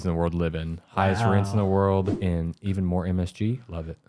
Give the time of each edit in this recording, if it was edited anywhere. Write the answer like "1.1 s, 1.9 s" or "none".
2.1 s